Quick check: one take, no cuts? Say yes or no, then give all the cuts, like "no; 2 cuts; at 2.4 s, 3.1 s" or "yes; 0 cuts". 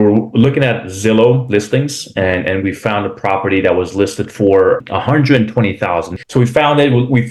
no; 1 cut; at 6.1 s